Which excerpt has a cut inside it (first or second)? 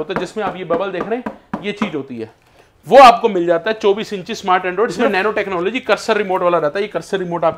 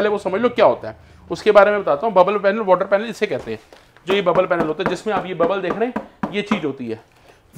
first